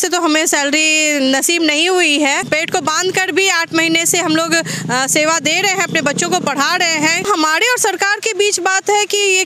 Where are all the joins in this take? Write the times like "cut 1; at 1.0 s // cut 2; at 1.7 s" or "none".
cut 1; at 2.5 s // cut 2; at 7.2 s